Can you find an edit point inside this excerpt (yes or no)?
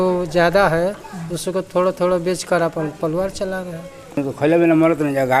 yes